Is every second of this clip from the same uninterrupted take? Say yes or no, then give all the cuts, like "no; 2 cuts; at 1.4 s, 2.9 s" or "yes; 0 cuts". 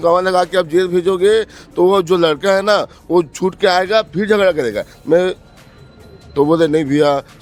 yes; 0 cuts